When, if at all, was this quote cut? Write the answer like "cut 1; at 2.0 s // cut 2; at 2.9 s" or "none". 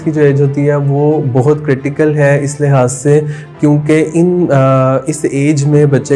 none